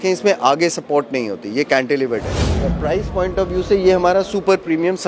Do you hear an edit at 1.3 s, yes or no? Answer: no